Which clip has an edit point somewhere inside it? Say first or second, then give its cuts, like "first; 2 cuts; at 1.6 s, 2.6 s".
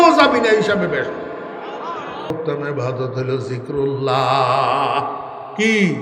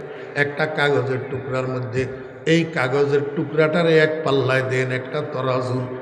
first; 1 cut; at 2.3 s